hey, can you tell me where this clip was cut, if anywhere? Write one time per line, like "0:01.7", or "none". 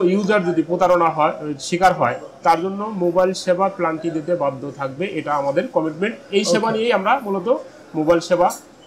none